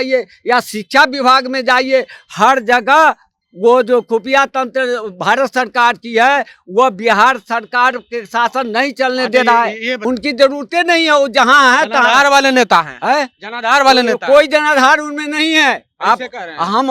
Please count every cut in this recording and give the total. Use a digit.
1